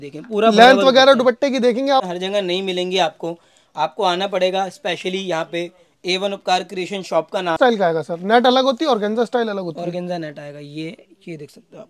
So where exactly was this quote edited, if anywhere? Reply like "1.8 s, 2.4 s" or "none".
2.1 s, 7.6 s